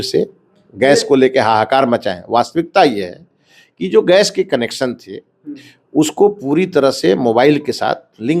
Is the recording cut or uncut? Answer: uncut